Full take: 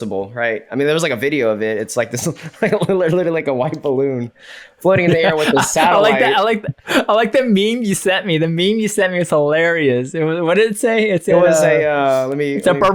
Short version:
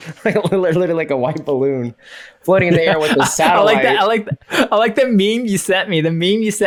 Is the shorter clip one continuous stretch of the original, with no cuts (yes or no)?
yes